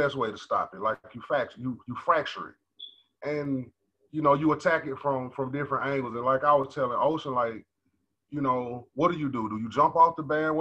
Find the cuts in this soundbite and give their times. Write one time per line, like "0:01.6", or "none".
none